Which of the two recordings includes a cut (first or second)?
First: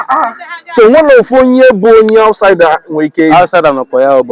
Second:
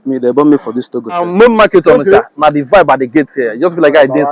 second